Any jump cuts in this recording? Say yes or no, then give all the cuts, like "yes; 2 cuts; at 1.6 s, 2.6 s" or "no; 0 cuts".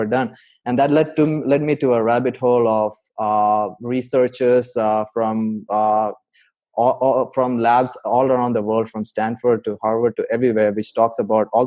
no; 0 cuts